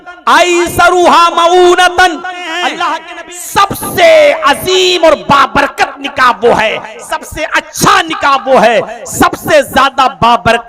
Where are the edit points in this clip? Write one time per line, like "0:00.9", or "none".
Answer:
0:03.1